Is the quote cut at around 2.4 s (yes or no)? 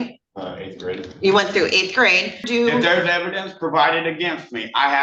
yes